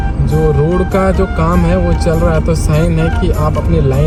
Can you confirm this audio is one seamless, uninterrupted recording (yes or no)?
yes